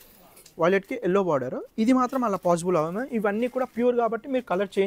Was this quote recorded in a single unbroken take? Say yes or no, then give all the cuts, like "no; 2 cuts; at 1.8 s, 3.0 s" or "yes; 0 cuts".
yes; 0 cuts